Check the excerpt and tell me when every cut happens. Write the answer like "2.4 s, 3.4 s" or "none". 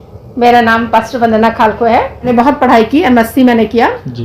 2.3 s